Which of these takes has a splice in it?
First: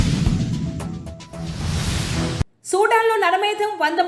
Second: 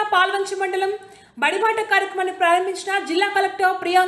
first; 1 cut; at 2.5 s

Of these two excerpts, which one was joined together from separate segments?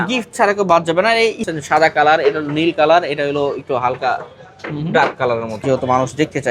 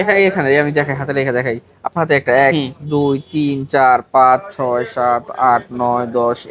first; 2 cuts; at 1.5 s, 5.6 s

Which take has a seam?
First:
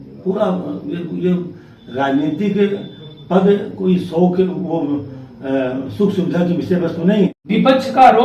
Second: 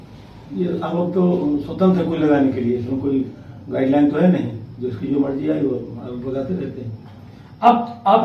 first; 1 cut; at 7.3 s

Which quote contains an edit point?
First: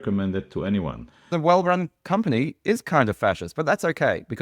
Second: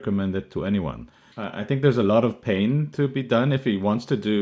first; 1 cut; at 1.3 s

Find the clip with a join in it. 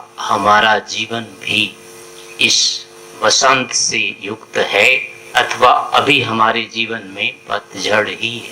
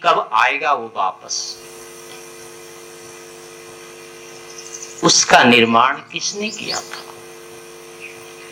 first; 2 cuts; at 2.0 s, 5.1 s

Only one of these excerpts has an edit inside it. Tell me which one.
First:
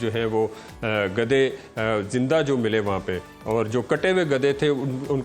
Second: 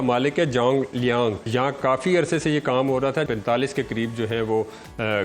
second; 2 cuts; at 1.5 s, 3.3 s

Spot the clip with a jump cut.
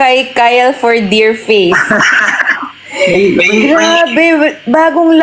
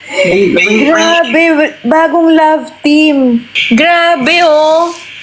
second; 1 cut; at 3.5 s

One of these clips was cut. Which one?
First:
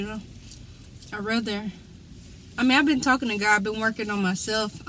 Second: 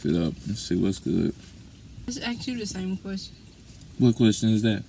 second; 1 cut; at 2.1 s

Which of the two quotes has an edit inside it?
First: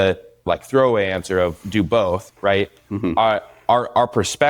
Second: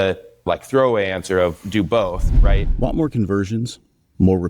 second; 1 cut; at 2.3 s

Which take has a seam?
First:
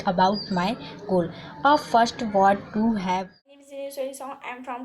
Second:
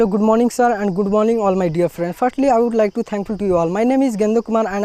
first; 1 cut; at 3.3 s

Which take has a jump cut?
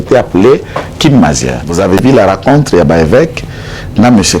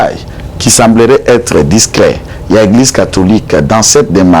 first; 1 cut; at 2.0 s

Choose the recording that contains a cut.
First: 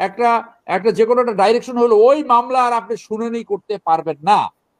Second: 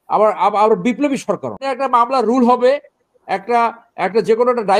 second; 1 cut; at 1.6 s

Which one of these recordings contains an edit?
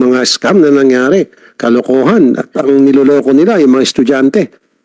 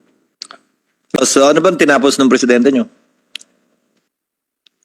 second; 1 cut; at 1.0 s

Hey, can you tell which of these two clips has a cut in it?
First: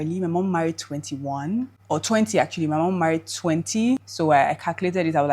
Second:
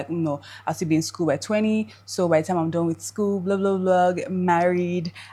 first; 2 cuts; at 1.8 s, 4.1 s

